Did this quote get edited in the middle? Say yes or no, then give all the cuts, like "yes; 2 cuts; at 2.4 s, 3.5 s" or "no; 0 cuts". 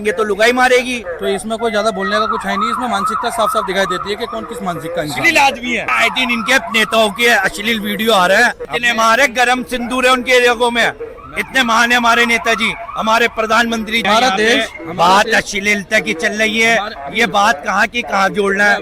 yes; 4 cuts; at 1.0 s, 5.9 s, 8.6 s, 14.0 s